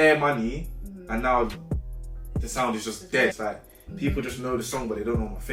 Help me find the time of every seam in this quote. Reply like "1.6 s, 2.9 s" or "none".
3.3 s